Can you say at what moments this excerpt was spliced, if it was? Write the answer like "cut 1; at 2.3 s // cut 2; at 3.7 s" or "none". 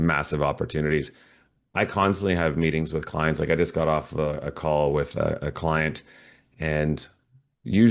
none